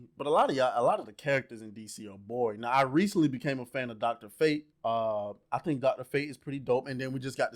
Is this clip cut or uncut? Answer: cut